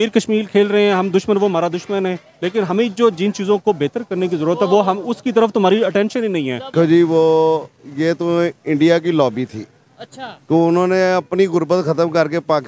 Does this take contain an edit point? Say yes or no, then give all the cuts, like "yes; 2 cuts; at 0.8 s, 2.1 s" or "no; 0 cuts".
yes; 1 cut; at 6.7 s